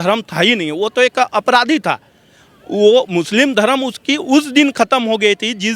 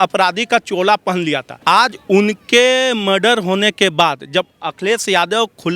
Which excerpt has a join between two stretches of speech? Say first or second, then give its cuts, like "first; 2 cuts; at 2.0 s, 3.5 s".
second; 1 cut; at 1.5 s